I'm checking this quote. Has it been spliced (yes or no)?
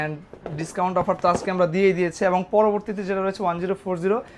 no